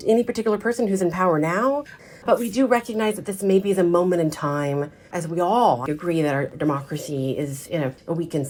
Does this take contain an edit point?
no; 0 cuts

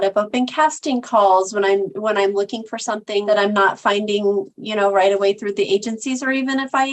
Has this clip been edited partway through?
yes; 1 cut; at 3.2 s

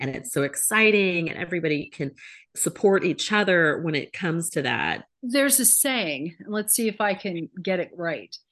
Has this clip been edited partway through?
yes; 1 cut; at 5.1 s

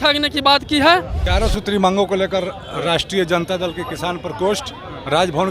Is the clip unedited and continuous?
no; 1 cut; at 1.2 s

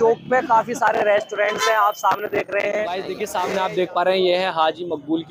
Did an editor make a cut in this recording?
yes; 1 cut; at 3.3 s

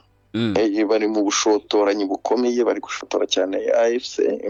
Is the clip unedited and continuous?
yes; 0 cuts

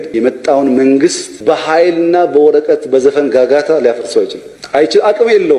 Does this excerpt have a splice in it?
no; 0 cuts

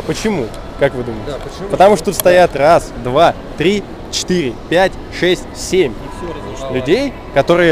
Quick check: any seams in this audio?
no; 0 cuts

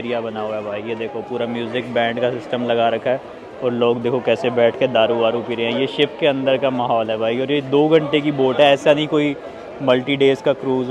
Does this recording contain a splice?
no; 0 cuts

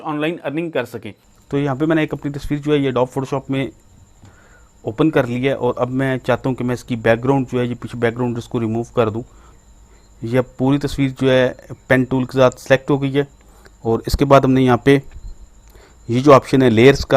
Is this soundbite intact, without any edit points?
no; 2 cuts; at 1.0 s, 9.6 s

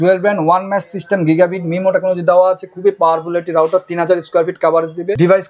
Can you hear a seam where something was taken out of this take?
no; 0 cuts

